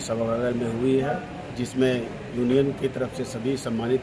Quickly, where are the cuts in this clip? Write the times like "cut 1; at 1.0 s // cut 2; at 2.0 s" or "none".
none